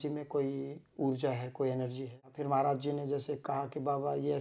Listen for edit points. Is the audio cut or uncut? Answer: cut